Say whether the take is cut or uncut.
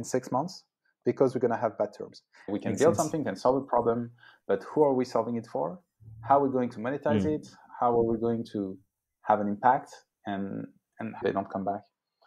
cut